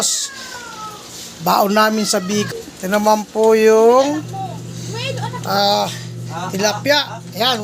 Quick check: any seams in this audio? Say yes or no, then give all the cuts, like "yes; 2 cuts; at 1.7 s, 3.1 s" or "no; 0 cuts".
yes; 1 cut; at 2.5 s